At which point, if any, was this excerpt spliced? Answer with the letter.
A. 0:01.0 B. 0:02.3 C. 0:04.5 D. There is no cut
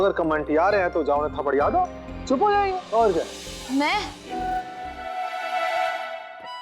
C